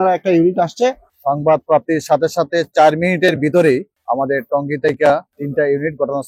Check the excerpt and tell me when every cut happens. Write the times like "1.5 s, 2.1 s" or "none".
1.1 s, 4.0 s, 5.4 s

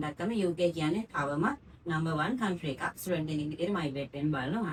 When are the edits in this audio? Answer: none

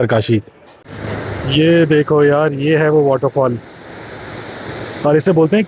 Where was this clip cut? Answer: 1.0 s

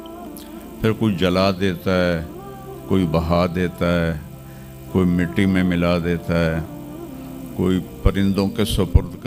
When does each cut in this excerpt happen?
none

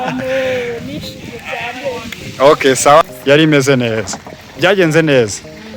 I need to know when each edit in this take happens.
3.0 s

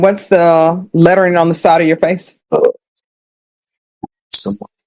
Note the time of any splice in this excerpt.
2.3 s

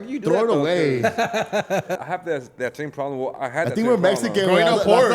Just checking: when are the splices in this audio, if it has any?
2.0 s

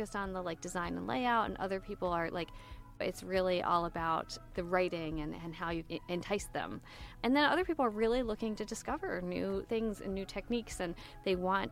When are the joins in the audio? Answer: 3.0 s, 4.4 s, 5.8 s, 7.1 s

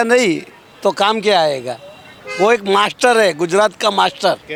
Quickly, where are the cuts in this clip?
none

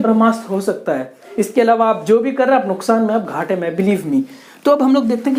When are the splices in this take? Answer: none

